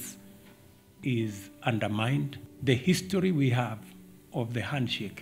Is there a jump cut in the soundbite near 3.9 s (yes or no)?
no